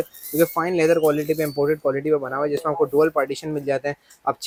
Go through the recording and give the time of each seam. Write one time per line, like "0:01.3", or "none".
none